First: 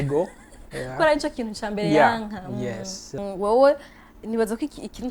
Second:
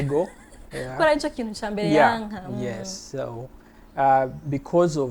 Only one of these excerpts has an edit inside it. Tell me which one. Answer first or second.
first